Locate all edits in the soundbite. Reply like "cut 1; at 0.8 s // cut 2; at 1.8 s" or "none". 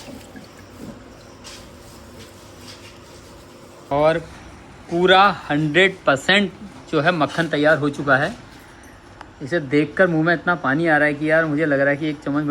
none